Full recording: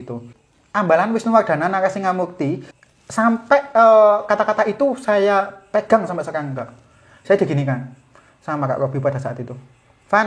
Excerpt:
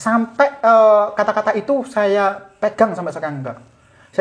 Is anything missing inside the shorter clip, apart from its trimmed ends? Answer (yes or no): no